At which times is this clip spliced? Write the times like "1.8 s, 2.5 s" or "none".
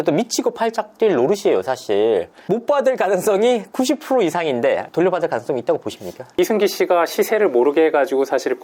4.9 s, 6.2 s